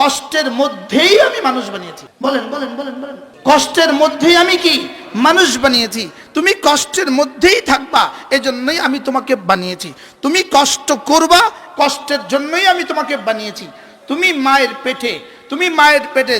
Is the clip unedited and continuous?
no; 2 cuts; at 2.0 s, 3.2 s

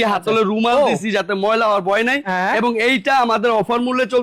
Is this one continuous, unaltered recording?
yes; 0 cuts

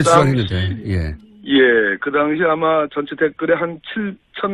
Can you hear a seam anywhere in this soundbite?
no; 0 cuts

